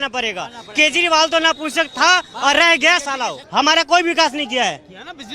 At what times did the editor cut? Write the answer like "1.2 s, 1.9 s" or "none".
3.4 s